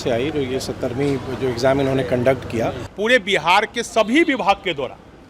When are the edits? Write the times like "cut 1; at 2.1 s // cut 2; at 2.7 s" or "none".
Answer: cut 1; at 2.9 s

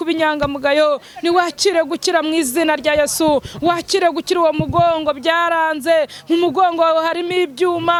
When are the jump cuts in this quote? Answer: none

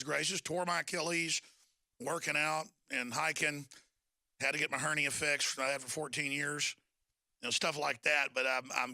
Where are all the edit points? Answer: cut 1; at 1.6 s

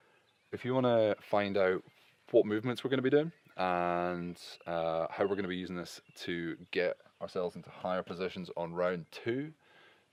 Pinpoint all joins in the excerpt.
none

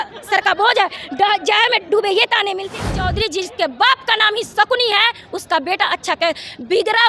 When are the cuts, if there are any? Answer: cut 1; at 2.7 s

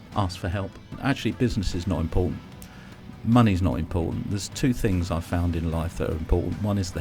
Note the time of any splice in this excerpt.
cut 1; at 1.0 s

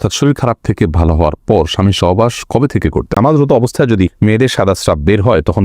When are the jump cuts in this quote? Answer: cut 1; at 3.2 s // cut 2; at 4.1 s

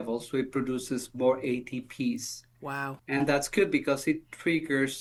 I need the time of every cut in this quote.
none

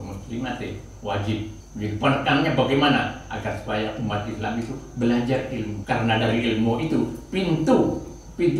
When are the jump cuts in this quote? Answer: cut 1; at 1.6 s // cut 2; at 5.7 s

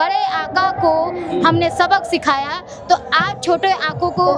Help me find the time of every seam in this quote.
none

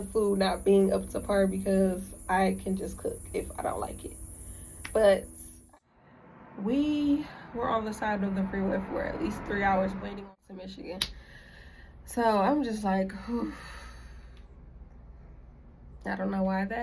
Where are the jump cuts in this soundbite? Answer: cut 1; at 5.6 s // cut 2; at 10.1 s

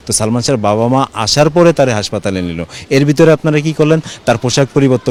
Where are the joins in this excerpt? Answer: none

